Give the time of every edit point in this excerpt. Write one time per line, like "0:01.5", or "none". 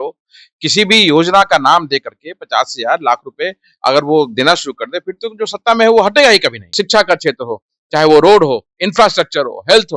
0:06.7